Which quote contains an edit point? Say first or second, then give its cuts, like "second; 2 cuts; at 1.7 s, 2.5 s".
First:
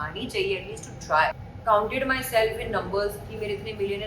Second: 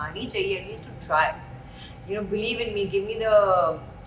first; 1 cut; at 1.5 s